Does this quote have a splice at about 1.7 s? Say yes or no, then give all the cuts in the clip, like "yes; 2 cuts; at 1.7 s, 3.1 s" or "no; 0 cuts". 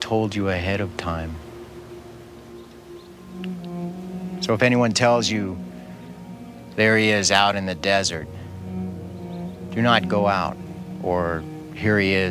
yes; 4 cuts; at 1.7 s, 4.5 s, 8.3 s, 9.7 s